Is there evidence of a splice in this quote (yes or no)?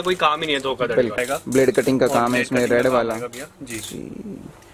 yes